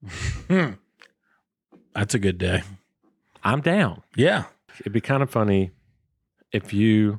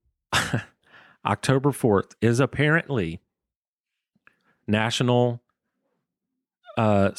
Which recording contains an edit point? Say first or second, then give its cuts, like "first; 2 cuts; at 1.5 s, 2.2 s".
first; 1 cut; at 4.7 s